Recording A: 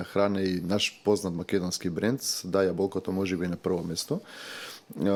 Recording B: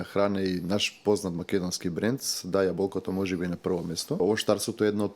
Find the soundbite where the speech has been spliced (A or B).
B